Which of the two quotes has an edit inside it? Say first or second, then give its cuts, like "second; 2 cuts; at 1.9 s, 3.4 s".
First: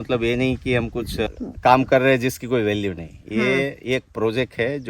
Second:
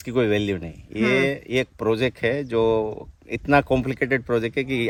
first; 1 cut; at 1.3 s